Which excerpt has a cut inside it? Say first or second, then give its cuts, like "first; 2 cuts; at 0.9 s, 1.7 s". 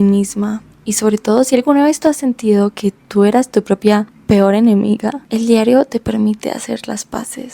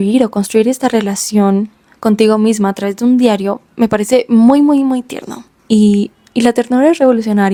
first; 1 cut; at 5.2 s